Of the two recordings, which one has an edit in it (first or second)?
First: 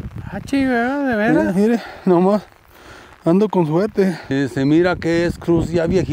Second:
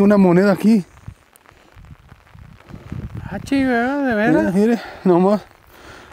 first